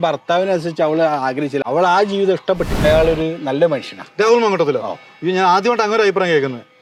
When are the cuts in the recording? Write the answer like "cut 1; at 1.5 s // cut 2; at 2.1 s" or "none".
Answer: cut 1; at 1.6 s // cut 2; at 2.8 s